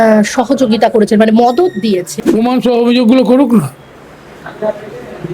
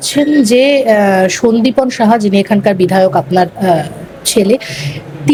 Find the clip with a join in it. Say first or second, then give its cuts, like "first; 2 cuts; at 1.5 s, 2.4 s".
first; 1 cut; at 2.1 s